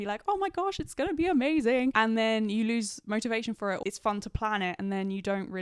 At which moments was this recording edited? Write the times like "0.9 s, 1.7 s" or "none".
1.9 s, 3.8 s